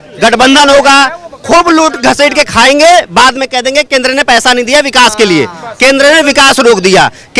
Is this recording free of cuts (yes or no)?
yes